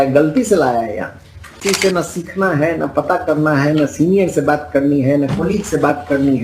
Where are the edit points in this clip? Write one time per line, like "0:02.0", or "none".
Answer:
0:01.6